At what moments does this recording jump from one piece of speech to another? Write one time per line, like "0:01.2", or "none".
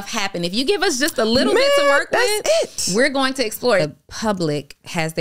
0:03.8